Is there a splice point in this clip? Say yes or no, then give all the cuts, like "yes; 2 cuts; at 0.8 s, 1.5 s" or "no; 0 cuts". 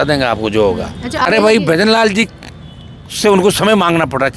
yes; 1 cut; at 1.2 s